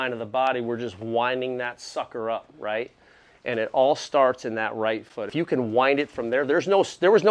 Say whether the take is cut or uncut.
uncut